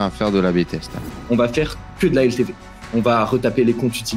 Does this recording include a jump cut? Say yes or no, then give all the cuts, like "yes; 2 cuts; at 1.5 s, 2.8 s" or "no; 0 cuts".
yes; 1 cut; at 1.1 s